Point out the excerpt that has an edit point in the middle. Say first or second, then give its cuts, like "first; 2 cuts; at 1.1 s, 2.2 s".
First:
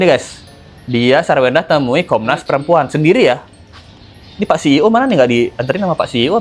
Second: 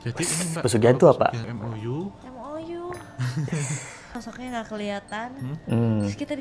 second; 2 cuts; at 1.5 s, 4.2 s